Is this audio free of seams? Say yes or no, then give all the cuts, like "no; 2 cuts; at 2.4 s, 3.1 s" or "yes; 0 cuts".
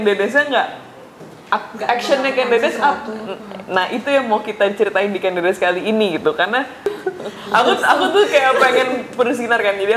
no; 1 cut; at 7.0 s